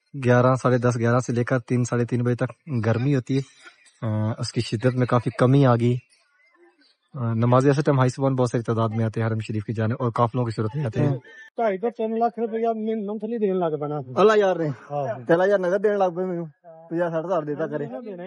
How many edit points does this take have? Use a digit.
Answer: 1